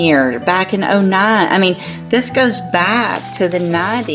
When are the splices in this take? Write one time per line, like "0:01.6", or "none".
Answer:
none